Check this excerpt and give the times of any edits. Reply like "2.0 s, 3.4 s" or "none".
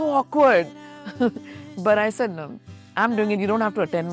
none